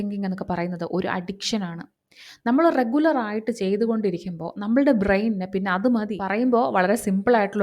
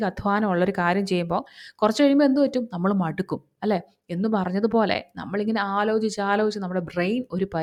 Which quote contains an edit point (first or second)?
first